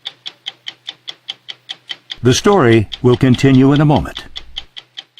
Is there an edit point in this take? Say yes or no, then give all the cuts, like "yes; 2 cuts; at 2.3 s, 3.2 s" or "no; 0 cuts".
yes; 1 cut; at 3.6 s